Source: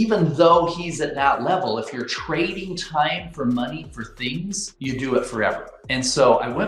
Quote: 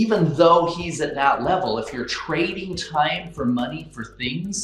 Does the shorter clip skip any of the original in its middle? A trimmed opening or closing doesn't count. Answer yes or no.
no